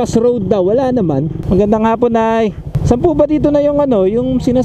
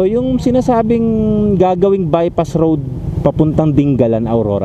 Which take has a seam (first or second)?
first